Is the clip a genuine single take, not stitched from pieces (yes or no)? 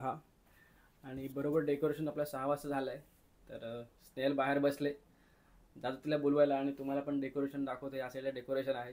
yes